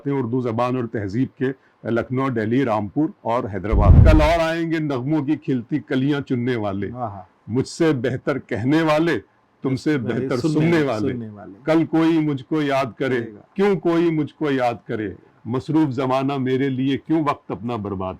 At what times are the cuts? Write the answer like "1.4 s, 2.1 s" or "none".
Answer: 4.0 s